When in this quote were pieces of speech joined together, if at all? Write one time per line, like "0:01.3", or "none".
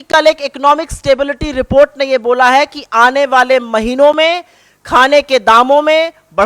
none